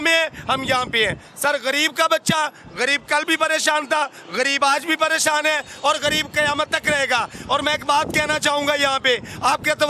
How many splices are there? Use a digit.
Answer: 0